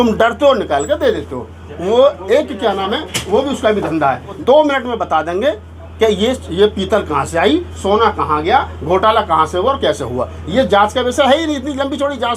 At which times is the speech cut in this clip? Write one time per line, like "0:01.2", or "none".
0:04.3